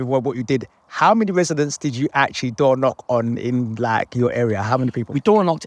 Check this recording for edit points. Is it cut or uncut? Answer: uncut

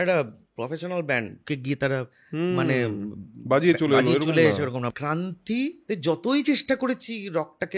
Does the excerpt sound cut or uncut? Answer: cut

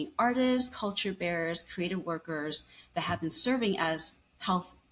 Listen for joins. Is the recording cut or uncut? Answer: uncut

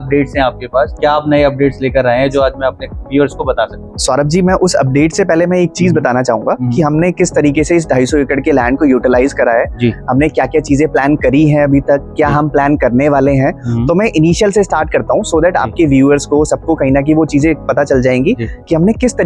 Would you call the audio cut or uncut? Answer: uncut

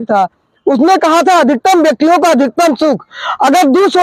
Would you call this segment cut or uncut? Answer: uncut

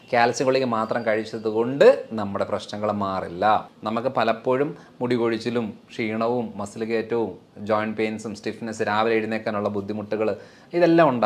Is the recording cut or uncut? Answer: cut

